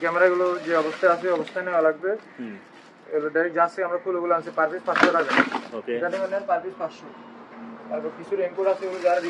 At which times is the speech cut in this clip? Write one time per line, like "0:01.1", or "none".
none